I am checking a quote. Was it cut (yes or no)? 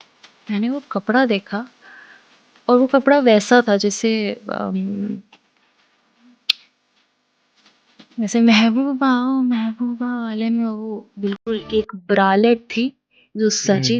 no